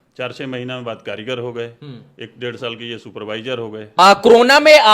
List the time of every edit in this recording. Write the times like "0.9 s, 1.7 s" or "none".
4.0 s